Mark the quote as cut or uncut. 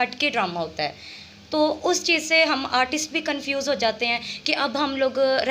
uncut